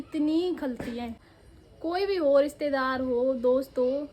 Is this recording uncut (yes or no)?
no